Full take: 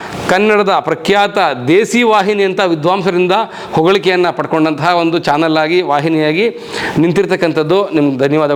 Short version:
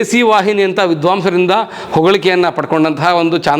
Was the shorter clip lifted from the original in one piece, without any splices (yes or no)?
yes